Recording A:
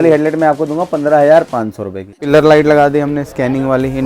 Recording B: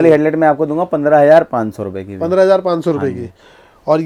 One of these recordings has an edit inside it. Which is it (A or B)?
A